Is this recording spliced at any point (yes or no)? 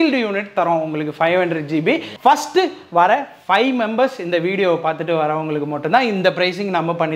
yes